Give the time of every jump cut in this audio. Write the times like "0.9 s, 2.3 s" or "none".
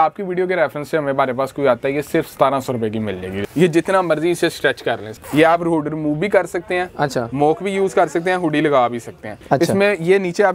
3.4 s, 5.1 s, 9.3 s

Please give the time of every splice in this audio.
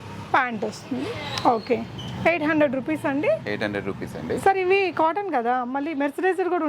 none

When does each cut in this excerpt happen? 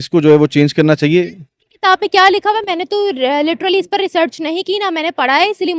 none

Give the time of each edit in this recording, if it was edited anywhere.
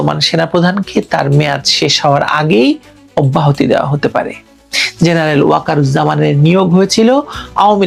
none

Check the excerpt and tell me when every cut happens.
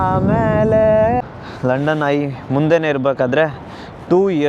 1.2 s

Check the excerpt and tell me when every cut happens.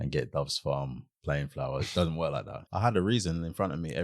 2.6 s

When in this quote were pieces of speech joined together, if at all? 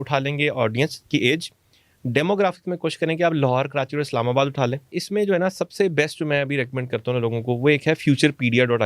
4.9 s

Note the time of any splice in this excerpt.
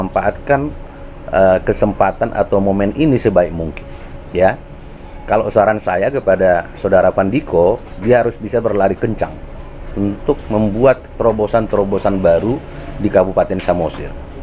none

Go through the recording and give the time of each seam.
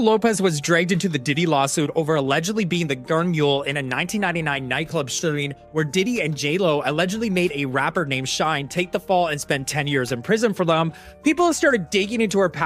none

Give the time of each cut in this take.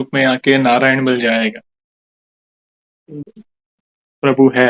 3.3 s

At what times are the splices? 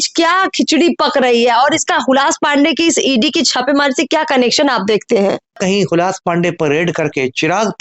5.6 s

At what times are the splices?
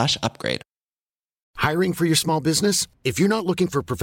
1.5 s

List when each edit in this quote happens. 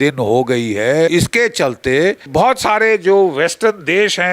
1.1 s, 2.3 s

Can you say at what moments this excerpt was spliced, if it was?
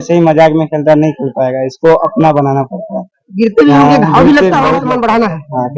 4.8 s

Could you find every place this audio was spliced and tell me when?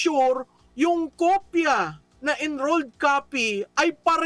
2.0 s

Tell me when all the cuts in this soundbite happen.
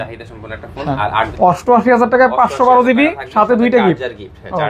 1.3 s

